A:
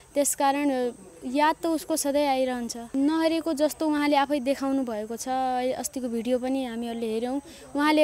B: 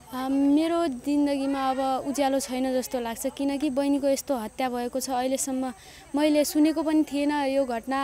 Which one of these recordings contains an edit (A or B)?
A